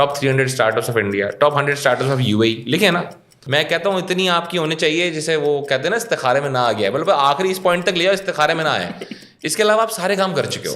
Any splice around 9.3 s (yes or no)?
no